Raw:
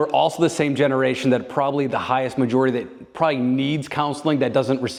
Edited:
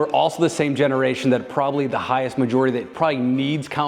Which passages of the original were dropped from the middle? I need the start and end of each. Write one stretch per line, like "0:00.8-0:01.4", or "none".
0:02.9-0:03.1